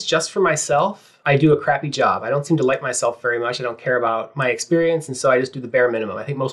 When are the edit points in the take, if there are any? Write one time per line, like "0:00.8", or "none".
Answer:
0:01.1

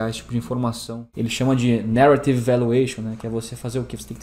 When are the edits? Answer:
0:01.1

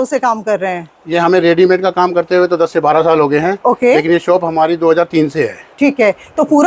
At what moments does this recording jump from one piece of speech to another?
none

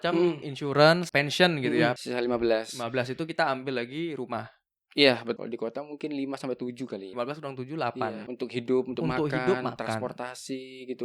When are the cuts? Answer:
0:01.0
0:02.0
0:05.4
0:07.1
0:08.3

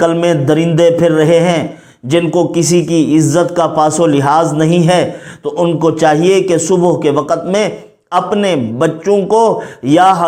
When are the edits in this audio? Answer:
none

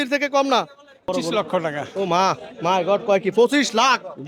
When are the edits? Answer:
0:01.1

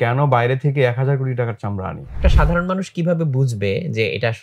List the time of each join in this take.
0:02.1

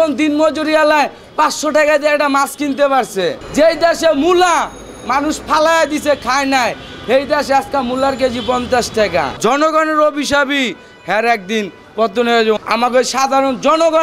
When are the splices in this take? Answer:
0:03.4
0:09.4
0:12.6

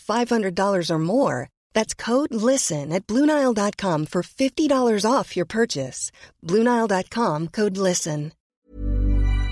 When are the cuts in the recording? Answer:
0:08.4

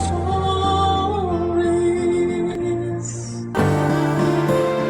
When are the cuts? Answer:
0:03.4

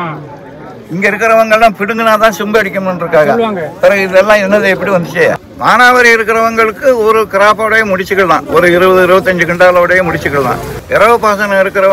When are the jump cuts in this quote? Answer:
0:05.4
0:10.7

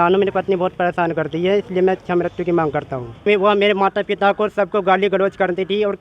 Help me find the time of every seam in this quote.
0:03.2

